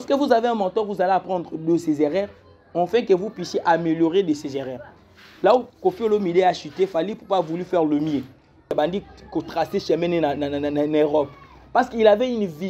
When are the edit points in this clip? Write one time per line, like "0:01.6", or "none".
0:08.7